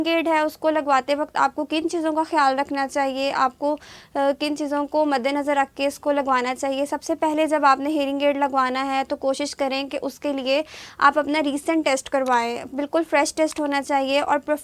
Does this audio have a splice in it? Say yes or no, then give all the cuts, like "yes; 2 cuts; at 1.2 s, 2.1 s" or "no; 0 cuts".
no; 0 cuts